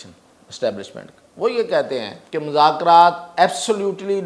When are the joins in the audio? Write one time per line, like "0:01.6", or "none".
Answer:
0:02.2